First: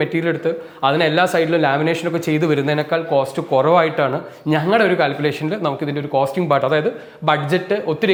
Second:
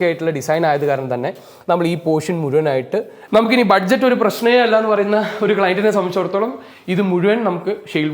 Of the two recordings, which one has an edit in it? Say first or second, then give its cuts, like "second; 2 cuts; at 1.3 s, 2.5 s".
second; 1 cut; at 3.2 s